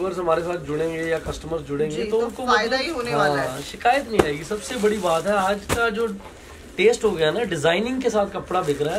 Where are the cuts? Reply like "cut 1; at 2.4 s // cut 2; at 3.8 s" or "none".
none